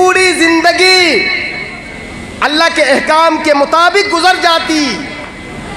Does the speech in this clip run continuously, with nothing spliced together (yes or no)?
yes